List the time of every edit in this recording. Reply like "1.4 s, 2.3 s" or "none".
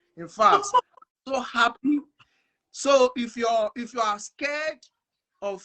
none